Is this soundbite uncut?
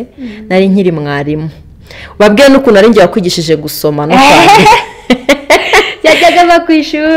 yes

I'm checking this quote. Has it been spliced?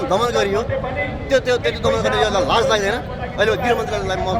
no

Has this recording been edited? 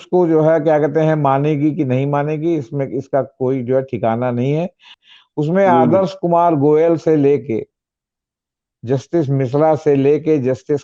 yes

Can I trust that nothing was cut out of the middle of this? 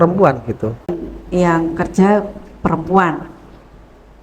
no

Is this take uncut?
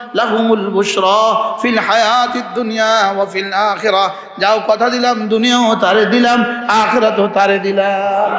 yes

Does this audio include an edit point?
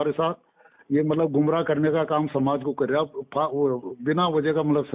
no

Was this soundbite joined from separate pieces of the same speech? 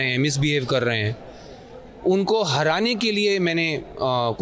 no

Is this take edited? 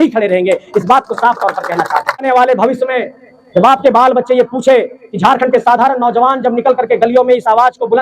yes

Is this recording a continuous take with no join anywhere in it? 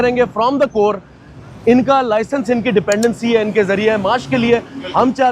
yes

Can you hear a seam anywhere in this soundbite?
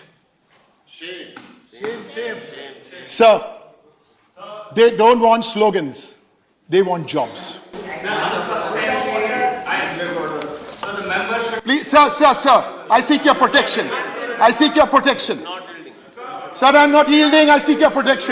no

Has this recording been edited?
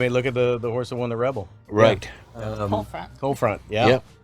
yes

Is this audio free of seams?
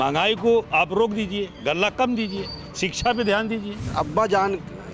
no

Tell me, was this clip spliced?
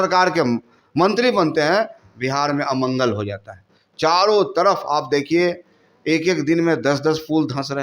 no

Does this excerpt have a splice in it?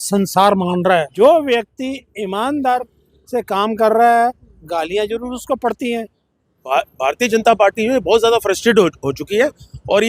yes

